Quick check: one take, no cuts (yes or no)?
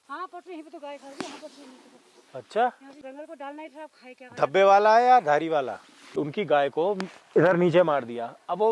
no